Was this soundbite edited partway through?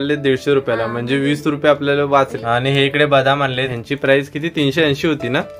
yes; 2 cuts; at 2.4 s, 3.7 s

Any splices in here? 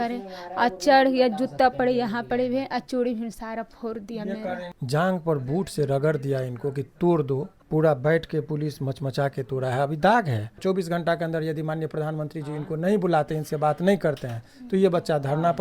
yes; 3 cuts; at 4.7 s, 7.6 s, 10.6 s

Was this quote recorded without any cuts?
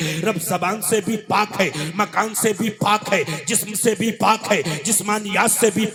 yes; 0 cuts

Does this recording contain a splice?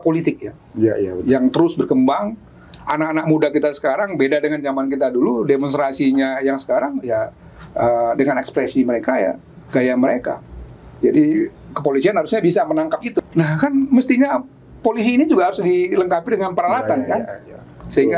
yes; 1 cut; at 13.2 s

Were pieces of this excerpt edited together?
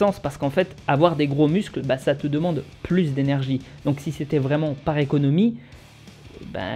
no; 0 cuts

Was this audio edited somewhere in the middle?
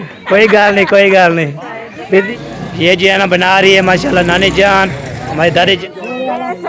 yes; 2 cuts; at 2.2 s, 5.8 s

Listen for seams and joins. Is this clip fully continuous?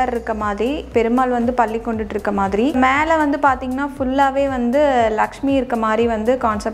no; 1 cut; at 2.7 s

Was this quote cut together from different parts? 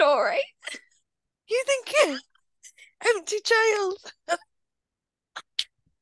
no; 0 cuts

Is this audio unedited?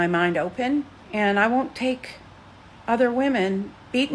no; 1 cut; at 1.0 s

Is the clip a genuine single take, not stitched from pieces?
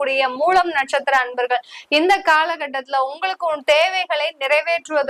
yes; 0 cuts

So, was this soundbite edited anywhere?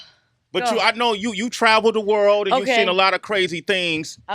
yes; 1 cut; at 1.4 s

